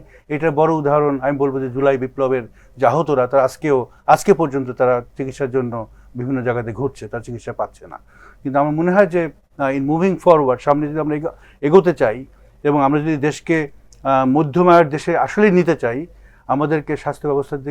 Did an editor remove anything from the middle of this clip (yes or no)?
no